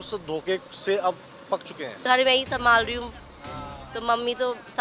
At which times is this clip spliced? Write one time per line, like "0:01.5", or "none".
0:02.0